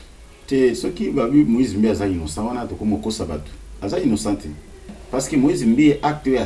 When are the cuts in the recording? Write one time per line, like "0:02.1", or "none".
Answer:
none